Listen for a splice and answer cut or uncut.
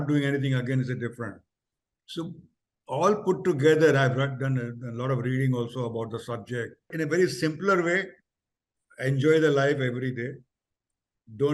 cut